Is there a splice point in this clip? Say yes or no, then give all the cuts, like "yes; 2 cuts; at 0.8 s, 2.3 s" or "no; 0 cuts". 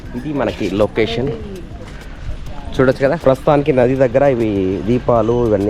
yes; 1 cut; at 3.2 s